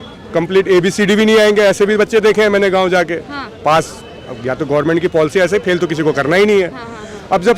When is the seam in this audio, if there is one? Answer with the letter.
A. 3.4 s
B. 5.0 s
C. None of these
C